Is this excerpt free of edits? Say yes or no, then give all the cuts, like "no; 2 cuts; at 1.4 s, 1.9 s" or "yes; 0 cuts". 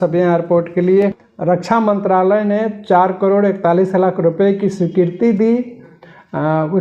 no; 1 cut; at 1.3 s